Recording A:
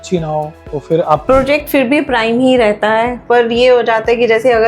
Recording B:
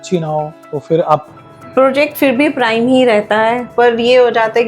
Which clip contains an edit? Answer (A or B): A